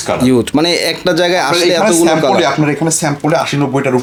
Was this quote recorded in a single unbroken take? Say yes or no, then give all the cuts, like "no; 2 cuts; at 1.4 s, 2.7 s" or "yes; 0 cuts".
yes; 0 cuts